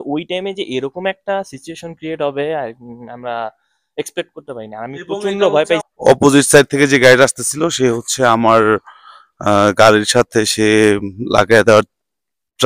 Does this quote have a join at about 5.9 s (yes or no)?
yes